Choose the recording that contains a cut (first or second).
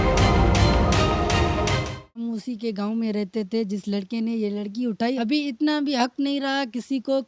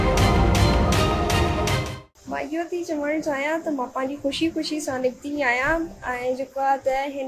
first